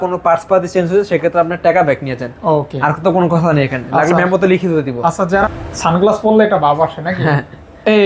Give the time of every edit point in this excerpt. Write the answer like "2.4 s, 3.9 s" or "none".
5.5 s

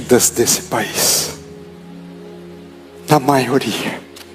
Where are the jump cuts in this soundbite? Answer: 1.4 s, 3.0 s

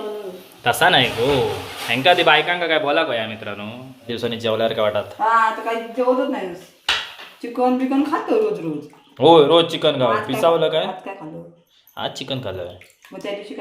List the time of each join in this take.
4.1 s

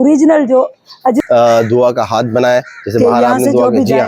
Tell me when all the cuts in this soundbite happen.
1.2 s

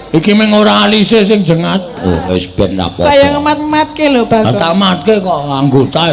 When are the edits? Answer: 2.3 s

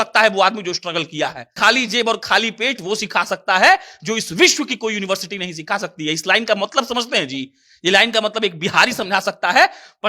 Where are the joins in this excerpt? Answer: 1.5 s

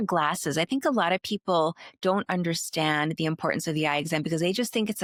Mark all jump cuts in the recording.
none

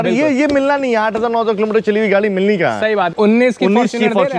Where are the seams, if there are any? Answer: 3.1 s

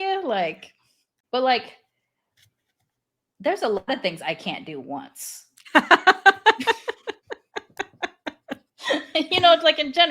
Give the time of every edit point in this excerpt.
1.2 s

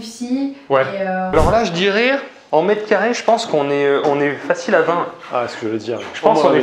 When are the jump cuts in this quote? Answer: 1.3 s

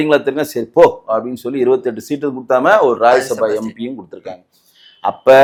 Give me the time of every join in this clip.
none

